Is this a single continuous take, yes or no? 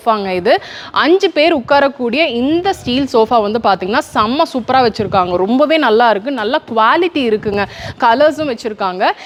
yes